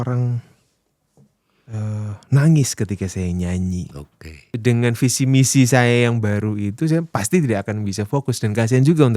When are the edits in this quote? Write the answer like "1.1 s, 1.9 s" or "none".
4.5 s

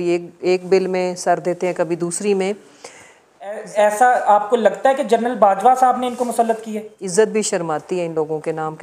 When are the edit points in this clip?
3.6 s, 7.0 s

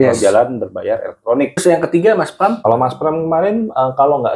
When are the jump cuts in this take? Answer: 1.6 s, 2.6 s

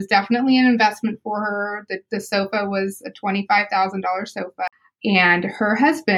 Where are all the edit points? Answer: 4.7 s

